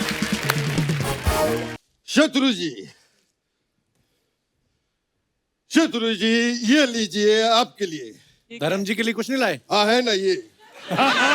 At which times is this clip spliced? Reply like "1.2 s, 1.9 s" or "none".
1.8 s